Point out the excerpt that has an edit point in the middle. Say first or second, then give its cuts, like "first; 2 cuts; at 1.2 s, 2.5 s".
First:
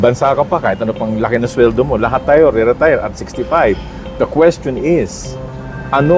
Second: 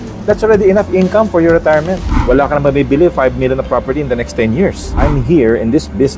second; 2 cuts; at 2.1 s, 5.0 s